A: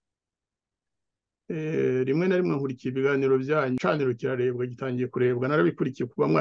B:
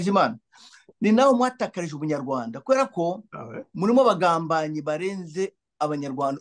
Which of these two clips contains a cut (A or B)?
A